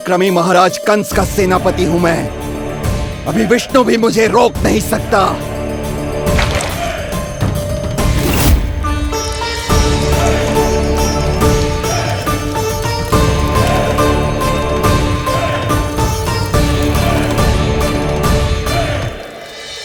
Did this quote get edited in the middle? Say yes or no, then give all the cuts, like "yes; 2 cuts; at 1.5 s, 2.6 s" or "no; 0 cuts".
no; 0 cuts